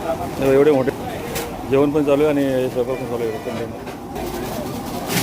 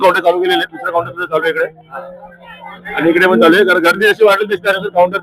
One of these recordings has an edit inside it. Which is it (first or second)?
first